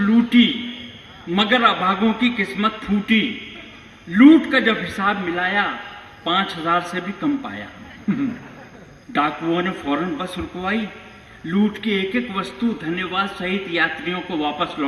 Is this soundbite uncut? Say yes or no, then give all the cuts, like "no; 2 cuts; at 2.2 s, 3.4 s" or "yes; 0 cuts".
yes; 0 cuts